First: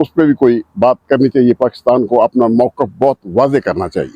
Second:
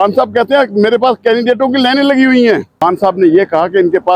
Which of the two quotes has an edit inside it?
second; 1 cut; at 2.7 s

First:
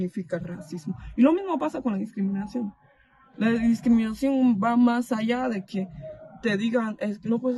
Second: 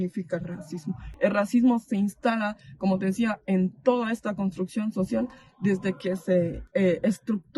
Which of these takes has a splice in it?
second; 2 cuts; at 1.0 s, 6.6 s

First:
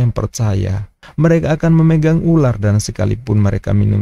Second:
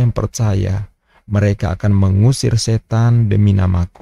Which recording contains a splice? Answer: first; 1 cut; at 1.0 s

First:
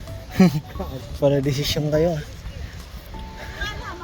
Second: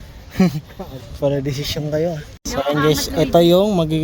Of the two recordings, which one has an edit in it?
second; 1 cut; at 2.3 s

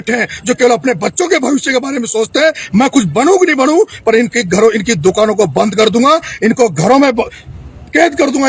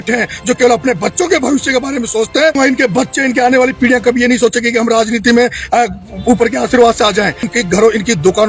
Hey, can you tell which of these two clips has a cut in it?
second; 2 cuts; at 2.5 s, 7.5 s

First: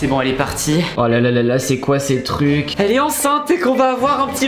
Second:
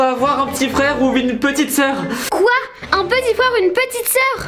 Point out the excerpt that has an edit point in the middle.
first; 2 cuts; at 0.9 s, 2.7 s

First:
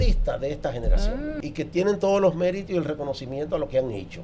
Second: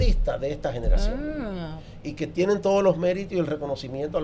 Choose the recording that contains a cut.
first; 1 cut; at 1.4 s

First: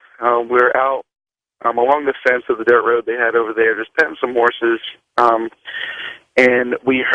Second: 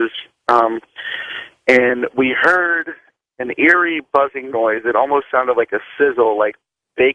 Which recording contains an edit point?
first; 1 cut; at 3.2 s

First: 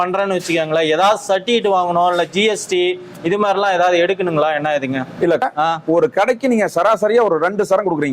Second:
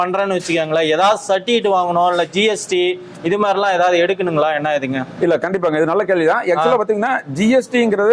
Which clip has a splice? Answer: first; 1 cut; at 5.5 s

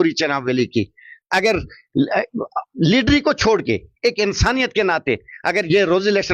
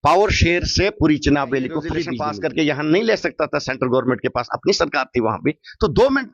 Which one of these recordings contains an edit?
second; 1 cut; at 2.1 s

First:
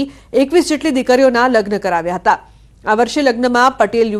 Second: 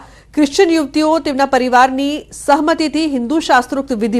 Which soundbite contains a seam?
second; 1 cut; at 3.3 s

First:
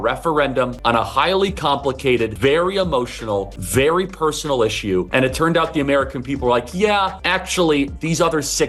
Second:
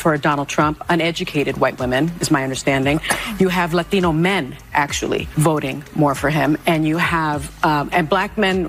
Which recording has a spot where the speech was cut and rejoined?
first; 5 cuts; at 1.0 s, 2.3 s, 3.6 s, 5.1 s, 7.2 s

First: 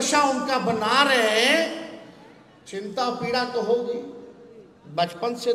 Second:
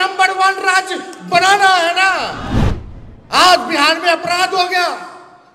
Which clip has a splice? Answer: second; 1 cut; at 2.6 s

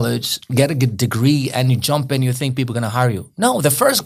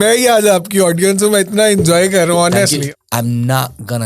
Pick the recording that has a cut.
second; 1 cut; at 2.9 s

